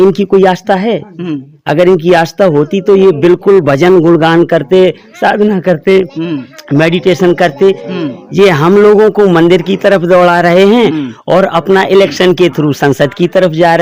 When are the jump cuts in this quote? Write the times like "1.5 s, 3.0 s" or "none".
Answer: none